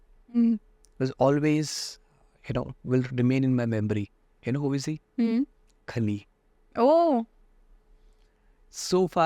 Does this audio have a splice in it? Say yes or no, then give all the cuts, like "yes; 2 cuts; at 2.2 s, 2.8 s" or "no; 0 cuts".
no; 0 cuts